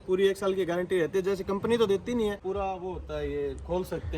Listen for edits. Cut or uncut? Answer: cut